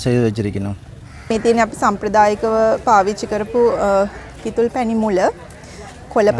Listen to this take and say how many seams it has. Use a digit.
1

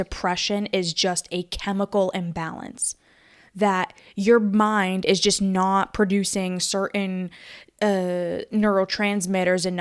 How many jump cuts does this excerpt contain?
0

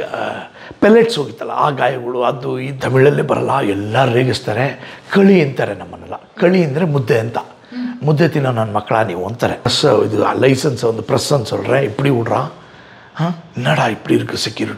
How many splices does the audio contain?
2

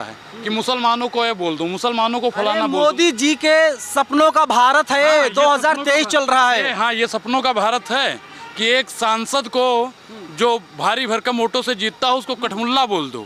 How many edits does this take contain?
0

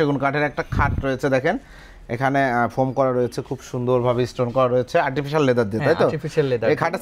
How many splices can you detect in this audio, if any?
0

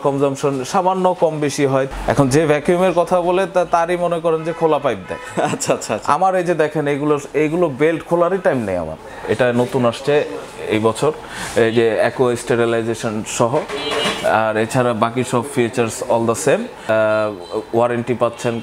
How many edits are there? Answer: 3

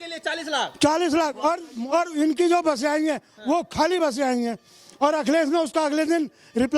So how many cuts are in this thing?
1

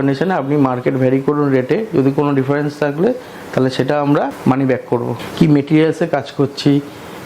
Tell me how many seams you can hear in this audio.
2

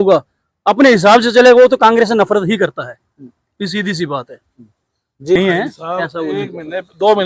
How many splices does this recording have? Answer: 1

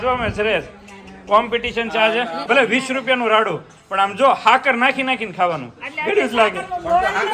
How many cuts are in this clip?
1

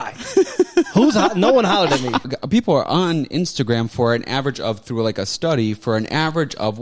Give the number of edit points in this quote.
1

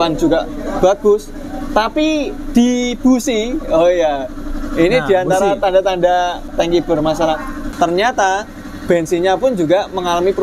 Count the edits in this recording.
2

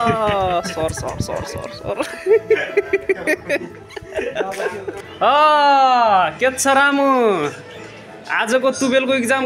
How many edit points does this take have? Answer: 1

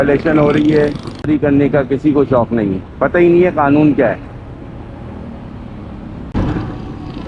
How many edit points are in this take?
2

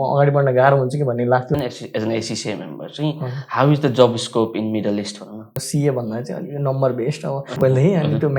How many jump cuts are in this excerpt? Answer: 3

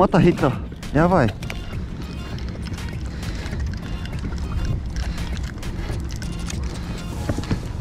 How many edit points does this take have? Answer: 0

